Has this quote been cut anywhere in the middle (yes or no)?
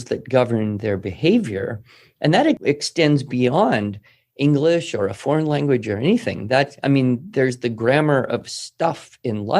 yes